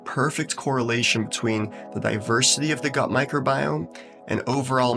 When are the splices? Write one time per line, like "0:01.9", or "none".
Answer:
none